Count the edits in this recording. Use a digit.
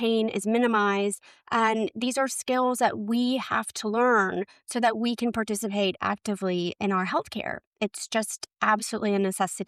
0